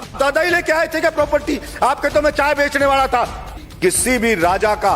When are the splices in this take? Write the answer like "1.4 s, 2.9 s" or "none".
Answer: 3.6 s